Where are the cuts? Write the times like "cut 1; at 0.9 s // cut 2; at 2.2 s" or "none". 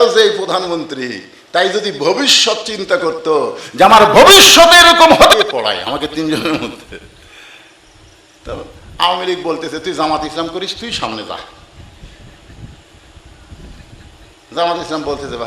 cut 1; at 5.3 s